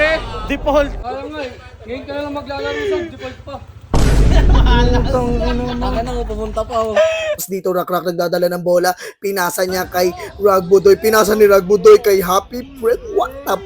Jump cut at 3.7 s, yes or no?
no